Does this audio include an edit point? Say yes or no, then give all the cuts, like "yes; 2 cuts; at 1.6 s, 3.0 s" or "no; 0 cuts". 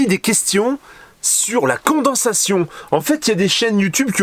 no; 0 cuts